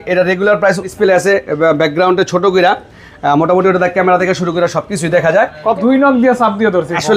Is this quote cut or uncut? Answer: cut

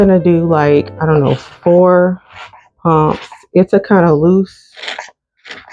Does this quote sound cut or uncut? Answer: uncut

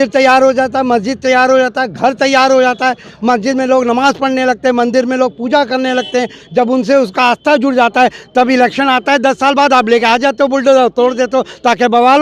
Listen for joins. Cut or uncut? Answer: uncut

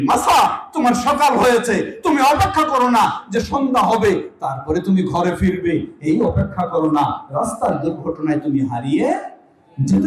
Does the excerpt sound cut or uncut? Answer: uncut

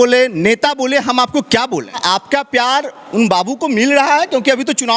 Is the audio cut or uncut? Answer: cut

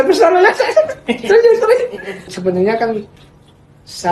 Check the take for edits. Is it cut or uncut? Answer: cut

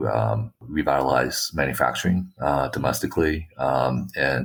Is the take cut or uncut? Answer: uncut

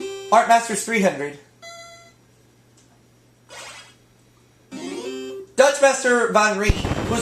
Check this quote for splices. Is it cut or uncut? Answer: cut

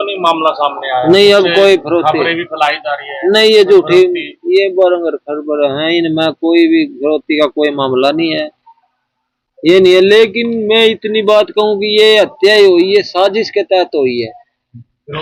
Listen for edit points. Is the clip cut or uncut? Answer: uncut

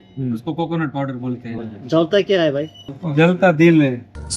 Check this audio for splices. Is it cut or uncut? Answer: cut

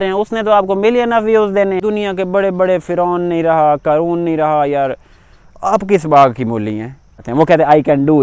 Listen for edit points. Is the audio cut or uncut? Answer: cut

